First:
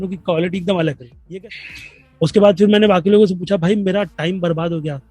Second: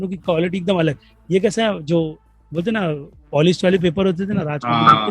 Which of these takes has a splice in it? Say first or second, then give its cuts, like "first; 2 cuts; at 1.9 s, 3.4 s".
first; 1 cut; at 1.1 s